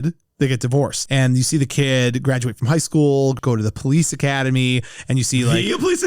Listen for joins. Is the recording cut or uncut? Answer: cut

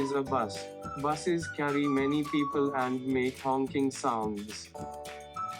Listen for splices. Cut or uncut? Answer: cut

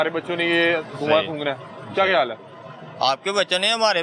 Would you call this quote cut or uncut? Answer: uncut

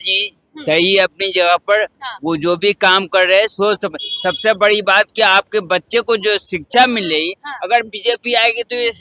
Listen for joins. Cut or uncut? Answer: uncut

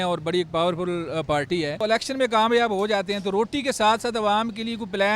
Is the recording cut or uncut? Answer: cut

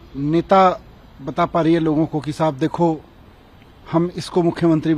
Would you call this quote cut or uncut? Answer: uncut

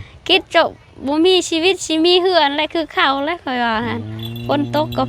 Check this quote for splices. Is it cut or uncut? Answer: uncut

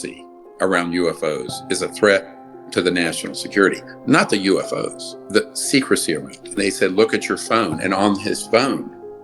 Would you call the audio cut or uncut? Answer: cut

